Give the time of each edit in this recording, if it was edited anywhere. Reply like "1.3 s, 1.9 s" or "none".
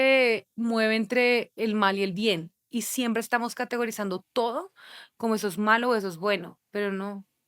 6.6 s

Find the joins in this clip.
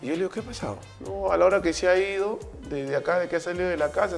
0.9 s

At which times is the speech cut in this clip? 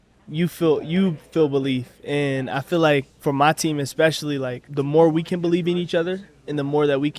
3.1 s, 4.6 s

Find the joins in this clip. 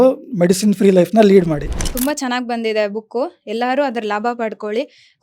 1.6 s

